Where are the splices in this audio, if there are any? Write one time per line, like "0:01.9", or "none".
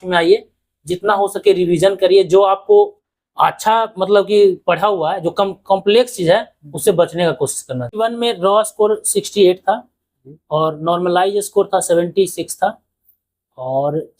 0:08.0

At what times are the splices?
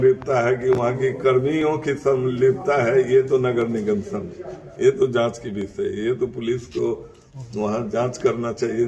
none

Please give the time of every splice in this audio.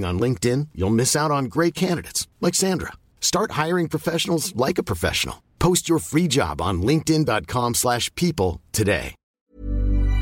0:09.3

